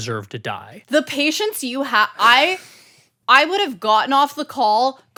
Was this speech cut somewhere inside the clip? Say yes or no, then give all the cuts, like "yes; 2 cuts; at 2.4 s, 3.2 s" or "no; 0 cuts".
no; 0 cuts